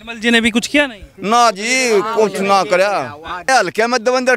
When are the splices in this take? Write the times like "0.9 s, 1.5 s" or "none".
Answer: 3.5 s